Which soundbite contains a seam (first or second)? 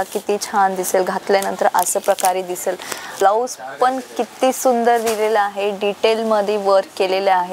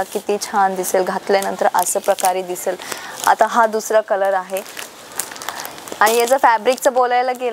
first